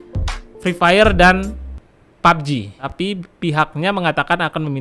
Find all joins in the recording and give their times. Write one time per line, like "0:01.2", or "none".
0:02.8